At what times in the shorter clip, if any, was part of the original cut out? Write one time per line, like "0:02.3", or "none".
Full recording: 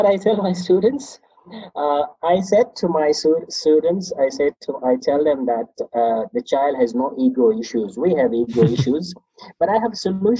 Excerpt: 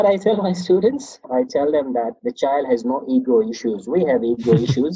0:01.2
0:02.2